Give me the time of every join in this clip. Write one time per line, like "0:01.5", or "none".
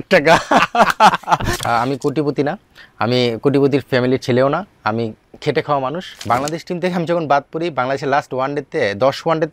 0:01.5
0:06.1